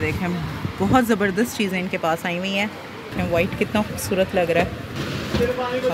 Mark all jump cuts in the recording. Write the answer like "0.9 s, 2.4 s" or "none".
3.1 s, 5.0 s